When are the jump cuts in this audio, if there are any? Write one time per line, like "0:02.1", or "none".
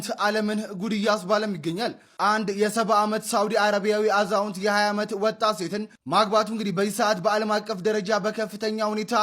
none